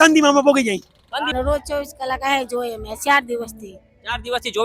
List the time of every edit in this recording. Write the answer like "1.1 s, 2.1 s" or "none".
1.2 s